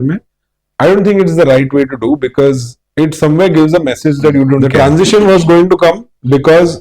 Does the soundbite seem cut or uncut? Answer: cut